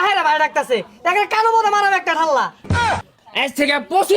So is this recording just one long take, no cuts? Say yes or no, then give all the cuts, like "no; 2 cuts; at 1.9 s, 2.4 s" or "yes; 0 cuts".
no; 1 cut; at 3.0 s